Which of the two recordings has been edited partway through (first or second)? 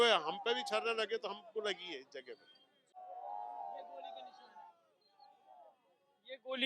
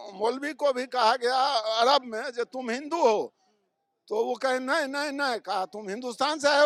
first